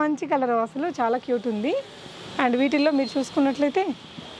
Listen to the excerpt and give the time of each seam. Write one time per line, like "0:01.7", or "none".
none